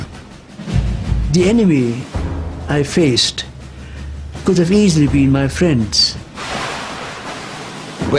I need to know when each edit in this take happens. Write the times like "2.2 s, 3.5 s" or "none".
5.5 s